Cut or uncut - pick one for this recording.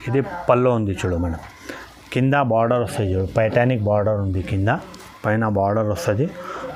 uncut